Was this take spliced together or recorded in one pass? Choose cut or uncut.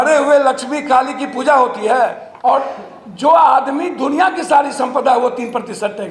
cut